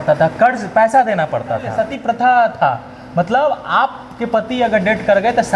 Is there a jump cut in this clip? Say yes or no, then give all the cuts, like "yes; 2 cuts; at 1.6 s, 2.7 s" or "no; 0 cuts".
yes; 1 cut; at 1.7 s